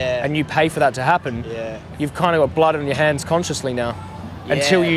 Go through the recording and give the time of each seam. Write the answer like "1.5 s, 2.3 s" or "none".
1.8 s